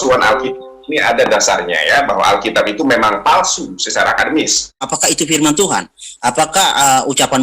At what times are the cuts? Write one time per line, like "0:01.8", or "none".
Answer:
0:04.9